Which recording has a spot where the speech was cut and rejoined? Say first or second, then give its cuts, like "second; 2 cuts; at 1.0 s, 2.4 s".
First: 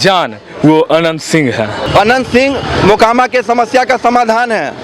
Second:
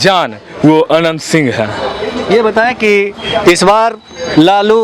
first; 1 cut; at 1.8 s